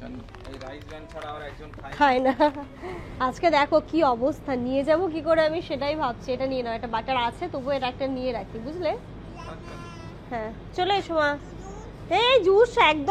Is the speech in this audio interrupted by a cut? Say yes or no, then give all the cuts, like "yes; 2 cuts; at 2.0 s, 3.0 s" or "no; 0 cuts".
no; 0 cuts